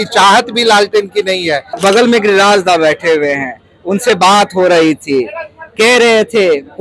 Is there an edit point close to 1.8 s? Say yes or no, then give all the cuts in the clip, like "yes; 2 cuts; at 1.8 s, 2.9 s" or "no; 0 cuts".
yes; 1 cut; at 1.8 s